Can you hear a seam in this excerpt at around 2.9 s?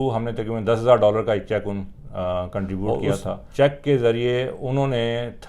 yes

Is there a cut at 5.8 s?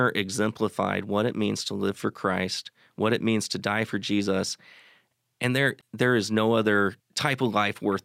yes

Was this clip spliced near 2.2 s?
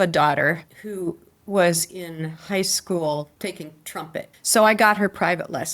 no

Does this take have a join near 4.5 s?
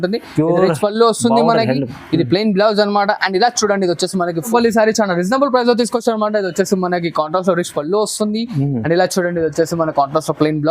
yes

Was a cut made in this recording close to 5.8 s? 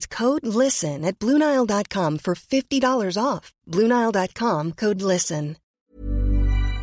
yes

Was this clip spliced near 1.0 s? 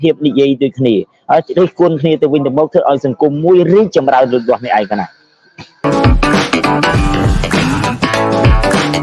no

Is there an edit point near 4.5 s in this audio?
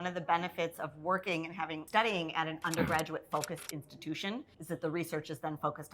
yes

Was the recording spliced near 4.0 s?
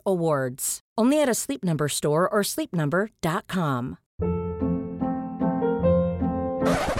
yes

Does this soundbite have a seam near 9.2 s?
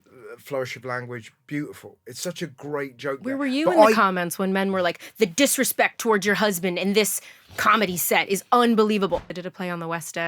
yes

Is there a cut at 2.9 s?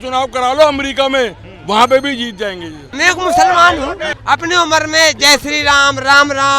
yes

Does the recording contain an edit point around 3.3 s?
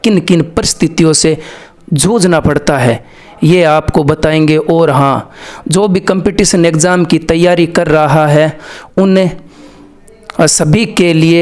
no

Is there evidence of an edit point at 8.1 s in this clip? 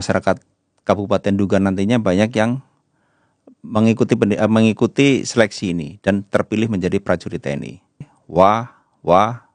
yes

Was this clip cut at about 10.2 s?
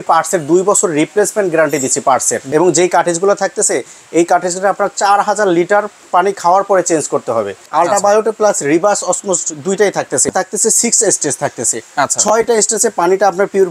yes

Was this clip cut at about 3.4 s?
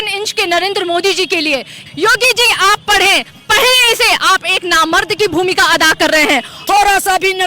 no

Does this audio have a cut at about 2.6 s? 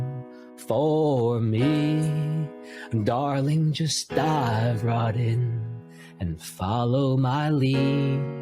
no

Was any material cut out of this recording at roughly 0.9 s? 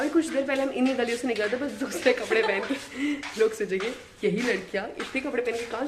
no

